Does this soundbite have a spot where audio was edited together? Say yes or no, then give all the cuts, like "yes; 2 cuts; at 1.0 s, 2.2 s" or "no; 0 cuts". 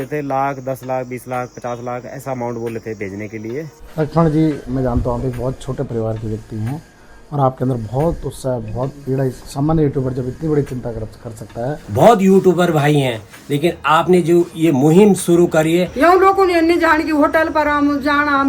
yes; 5 cuts; at 3.8 s, 4.7 s, 9.4 s, 11.8 s, 15.9 s